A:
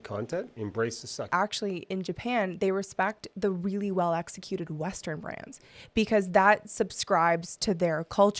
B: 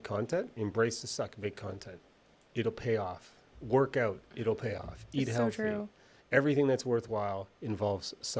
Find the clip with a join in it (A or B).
A